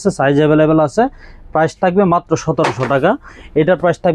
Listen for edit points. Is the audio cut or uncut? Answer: uncut